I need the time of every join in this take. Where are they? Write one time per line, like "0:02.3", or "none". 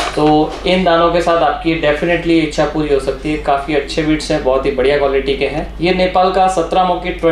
0:05.7